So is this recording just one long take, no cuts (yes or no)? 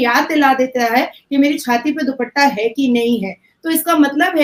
yes